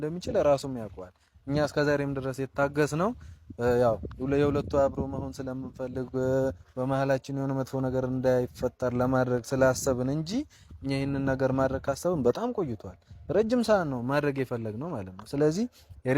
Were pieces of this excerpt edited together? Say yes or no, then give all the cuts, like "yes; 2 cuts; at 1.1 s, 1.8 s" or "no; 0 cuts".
no; 0 cuts